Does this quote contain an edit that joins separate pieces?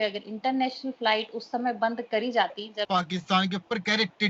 yes; 1 cut; at 2.9 s

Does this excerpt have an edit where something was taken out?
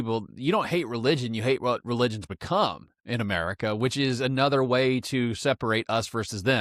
no; 0 cuts

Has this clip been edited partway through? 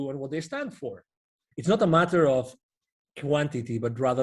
yes; 1 cut; at 1.4 s

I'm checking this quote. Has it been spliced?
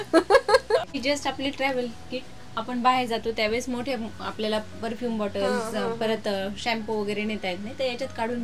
no; 0 cuts

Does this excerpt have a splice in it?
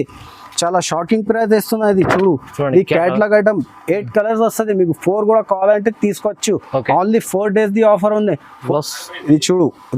yes; 1 cut; at 8.7 s

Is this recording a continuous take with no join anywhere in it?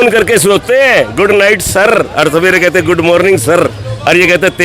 yes; 0 cuts

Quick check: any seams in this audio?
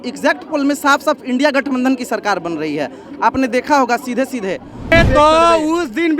yes; 1 cut; at 4.9 s

